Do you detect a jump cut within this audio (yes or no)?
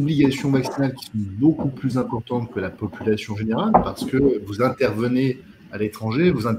no